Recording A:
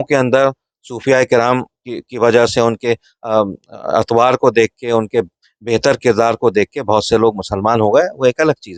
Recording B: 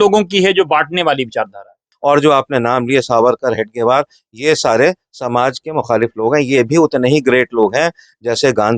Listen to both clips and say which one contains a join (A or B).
B